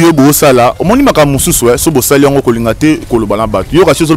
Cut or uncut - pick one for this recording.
uncut